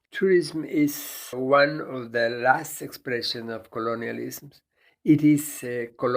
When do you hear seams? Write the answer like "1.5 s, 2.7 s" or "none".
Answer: 1.4 s